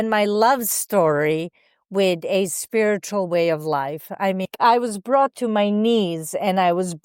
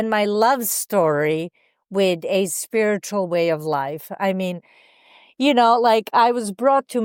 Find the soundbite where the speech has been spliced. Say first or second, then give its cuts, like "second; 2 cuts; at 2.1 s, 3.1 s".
first; 1 cut; at 4.5 s